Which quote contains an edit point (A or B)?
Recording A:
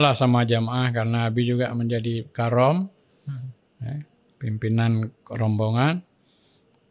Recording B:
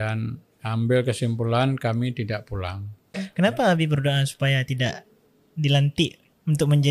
B